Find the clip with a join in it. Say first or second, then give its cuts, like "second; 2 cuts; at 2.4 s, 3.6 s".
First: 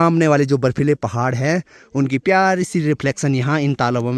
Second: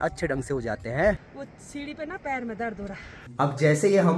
second; 2 cuts; at 1.2 s, 3.2 s